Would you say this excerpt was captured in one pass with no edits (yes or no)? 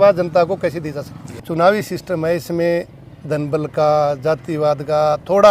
no